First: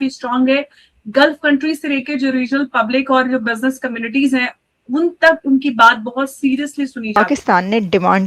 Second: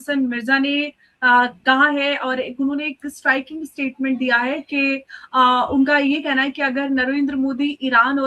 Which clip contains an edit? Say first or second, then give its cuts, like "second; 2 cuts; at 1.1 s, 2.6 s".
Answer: first; 1 cut; at 7.1 s